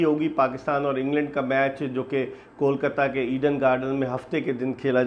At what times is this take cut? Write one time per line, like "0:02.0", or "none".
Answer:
none